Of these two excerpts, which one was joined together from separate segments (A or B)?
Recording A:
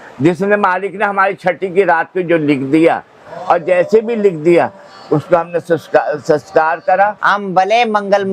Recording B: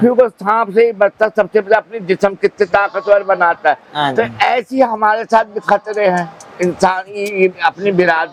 A